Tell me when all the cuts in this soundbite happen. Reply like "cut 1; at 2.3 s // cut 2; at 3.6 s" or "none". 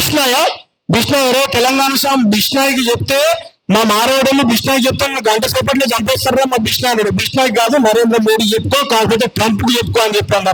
none